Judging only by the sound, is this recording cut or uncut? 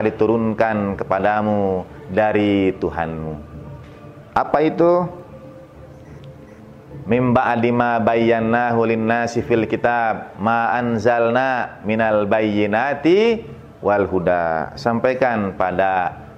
uncut